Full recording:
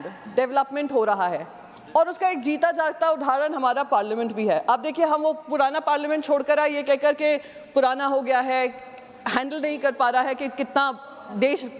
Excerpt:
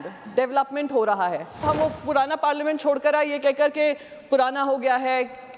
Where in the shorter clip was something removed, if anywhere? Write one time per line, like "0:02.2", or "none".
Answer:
0:01.6